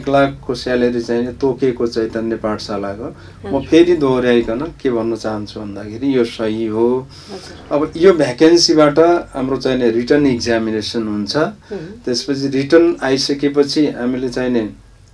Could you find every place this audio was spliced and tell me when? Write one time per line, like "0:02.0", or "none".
none

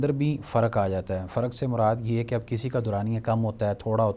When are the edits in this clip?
none

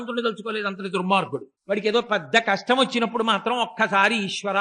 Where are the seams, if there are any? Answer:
0:01.5

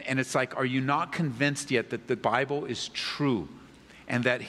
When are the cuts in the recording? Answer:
0:02.2

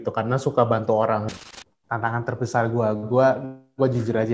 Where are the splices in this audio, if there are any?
0:01.3

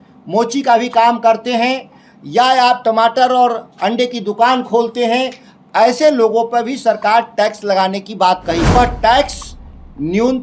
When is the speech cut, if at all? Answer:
0:08.8

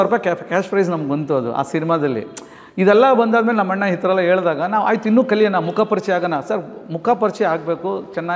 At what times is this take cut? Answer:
none

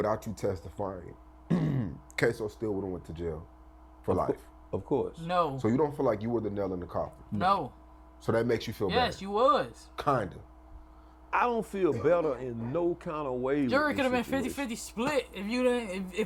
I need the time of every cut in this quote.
none

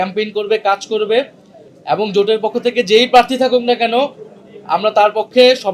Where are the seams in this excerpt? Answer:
none

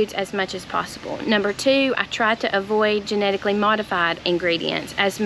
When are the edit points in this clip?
0:04.2

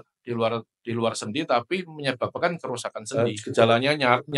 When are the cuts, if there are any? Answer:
0:03.0

